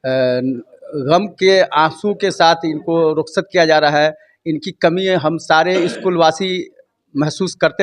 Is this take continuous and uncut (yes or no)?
yes